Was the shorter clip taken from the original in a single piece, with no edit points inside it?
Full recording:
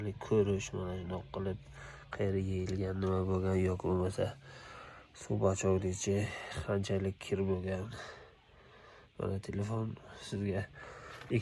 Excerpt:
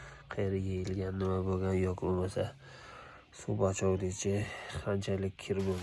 yes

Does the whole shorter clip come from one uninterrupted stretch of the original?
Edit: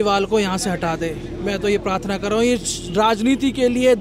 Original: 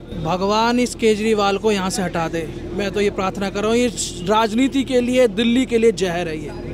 yes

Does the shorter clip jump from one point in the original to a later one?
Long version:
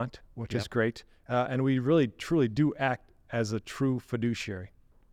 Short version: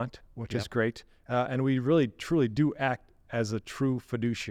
no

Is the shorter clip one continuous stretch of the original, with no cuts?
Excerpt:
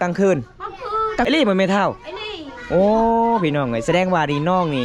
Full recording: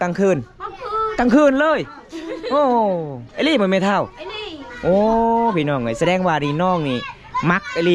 no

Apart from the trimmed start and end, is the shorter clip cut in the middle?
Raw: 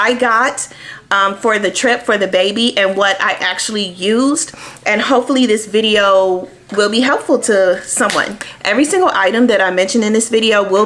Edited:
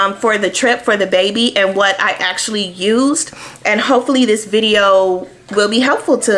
no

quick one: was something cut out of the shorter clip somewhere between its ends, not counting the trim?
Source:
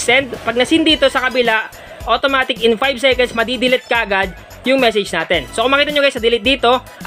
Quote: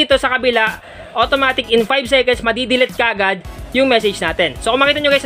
no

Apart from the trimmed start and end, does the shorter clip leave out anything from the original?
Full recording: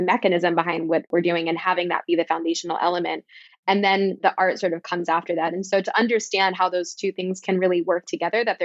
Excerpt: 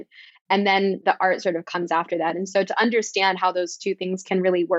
no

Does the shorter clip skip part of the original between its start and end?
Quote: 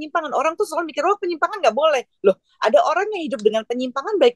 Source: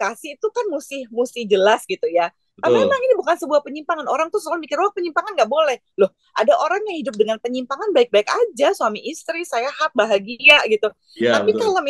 no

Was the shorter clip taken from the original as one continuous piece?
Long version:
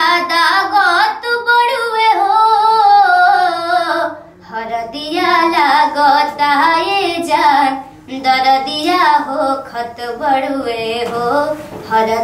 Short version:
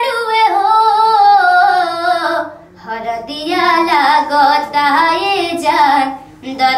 yes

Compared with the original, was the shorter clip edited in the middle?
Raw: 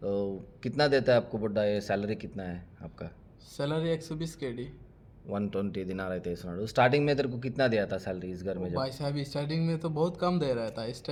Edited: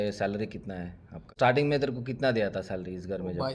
yes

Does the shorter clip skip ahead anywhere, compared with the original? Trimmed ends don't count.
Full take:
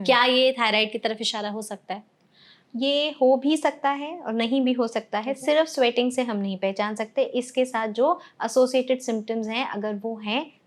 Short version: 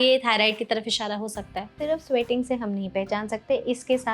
yes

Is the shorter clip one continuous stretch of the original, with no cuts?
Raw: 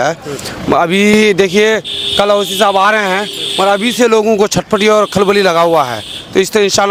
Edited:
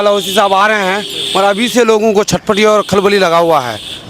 yes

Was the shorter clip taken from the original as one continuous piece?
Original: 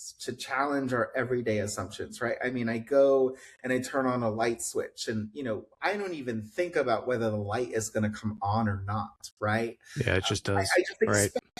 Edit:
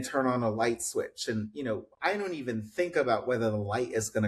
yes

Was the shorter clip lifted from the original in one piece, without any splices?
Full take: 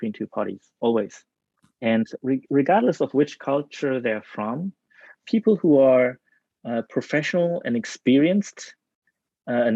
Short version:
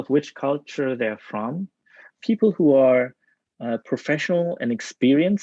yes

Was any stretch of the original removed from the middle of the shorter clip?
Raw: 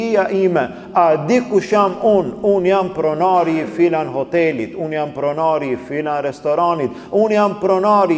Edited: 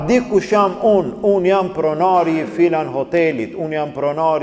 no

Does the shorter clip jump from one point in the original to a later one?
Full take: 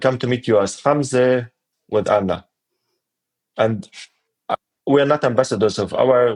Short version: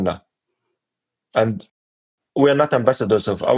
yes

